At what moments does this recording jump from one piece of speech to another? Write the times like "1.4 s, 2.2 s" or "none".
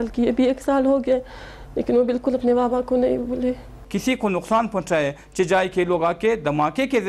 3.8 s